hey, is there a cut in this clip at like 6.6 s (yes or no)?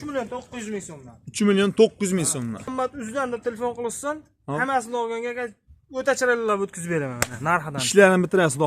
no